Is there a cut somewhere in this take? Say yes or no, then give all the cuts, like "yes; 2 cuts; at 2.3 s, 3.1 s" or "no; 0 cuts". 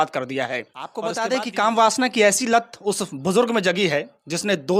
yes; 1 cut; at 1.0 s